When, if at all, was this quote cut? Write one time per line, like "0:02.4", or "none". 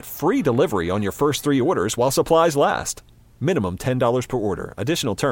none